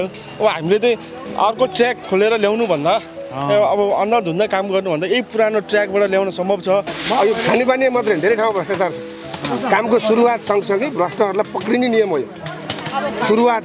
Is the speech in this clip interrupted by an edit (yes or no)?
yes